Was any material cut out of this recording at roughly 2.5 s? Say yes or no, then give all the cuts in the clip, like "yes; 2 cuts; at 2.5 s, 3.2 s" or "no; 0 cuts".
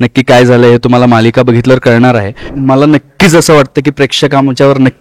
yes; 1 cut; at 2.5 s